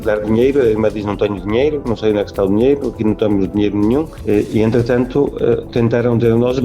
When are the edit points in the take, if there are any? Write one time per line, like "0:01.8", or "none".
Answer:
0:04.1